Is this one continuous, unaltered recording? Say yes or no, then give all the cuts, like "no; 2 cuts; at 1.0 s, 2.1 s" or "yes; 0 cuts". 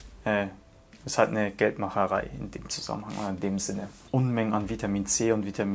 no; 1 cut; at 4.0 s